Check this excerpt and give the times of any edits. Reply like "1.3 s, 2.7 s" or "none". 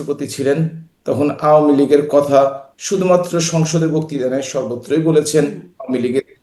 none